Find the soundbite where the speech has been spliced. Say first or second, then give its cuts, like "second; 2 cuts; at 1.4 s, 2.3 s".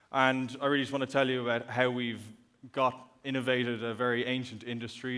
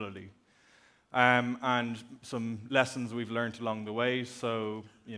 second; 1 cut; at 1.3 s